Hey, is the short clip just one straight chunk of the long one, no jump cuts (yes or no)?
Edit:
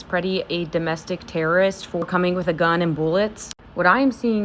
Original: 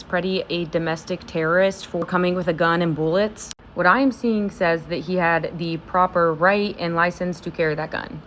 yes